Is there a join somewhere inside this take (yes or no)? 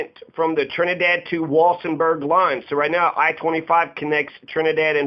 no